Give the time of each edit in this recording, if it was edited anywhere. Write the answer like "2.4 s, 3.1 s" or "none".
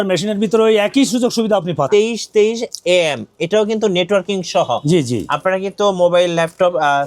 1.9 s

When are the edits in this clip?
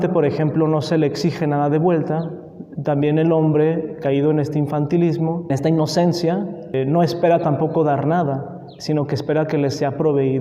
5.5 s, 6.7 s

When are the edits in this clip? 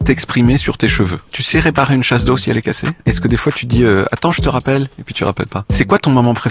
1.4 s, 3.1 s, 5.6 s

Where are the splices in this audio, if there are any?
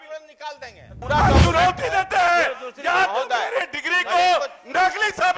0.9 s

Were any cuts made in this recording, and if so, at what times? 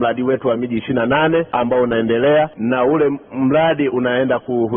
1.5 s, 2.6 s

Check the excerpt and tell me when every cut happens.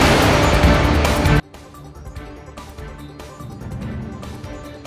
1.3 s

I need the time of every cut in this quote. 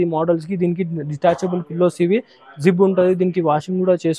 none

